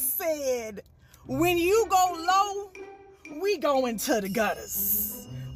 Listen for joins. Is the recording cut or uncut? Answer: uncut